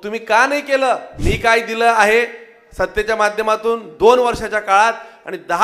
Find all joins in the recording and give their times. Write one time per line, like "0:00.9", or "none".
0:01.1